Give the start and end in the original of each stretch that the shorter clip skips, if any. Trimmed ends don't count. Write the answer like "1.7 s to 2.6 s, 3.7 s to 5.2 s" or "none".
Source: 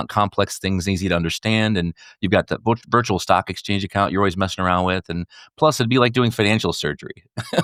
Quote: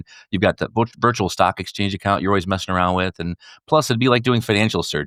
none